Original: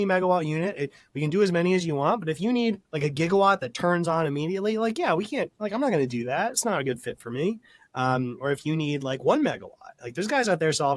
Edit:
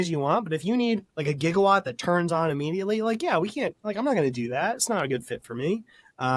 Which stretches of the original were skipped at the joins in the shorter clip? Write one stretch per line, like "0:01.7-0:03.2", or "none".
none